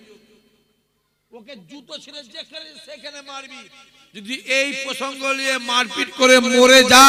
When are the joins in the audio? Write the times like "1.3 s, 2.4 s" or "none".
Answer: none